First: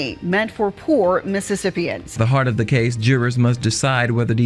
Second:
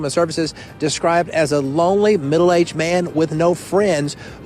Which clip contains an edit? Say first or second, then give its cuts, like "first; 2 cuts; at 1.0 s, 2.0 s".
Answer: first; 1 cut; at 2.2 s